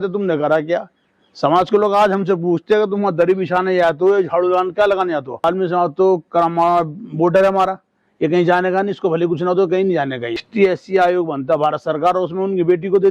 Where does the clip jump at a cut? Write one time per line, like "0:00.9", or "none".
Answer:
0:05.4
0:10.5